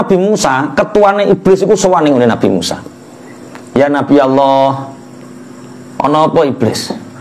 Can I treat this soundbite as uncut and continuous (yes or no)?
yes